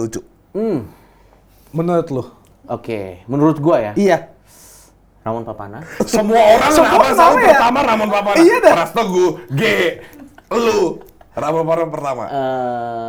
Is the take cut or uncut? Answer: uncut